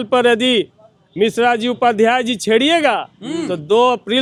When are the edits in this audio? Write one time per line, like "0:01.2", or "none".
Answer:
none